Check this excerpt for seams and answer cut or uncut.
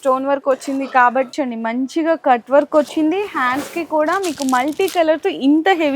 cut